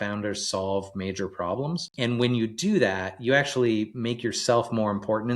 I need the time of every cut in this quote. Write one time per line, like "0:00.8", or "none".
0:01.9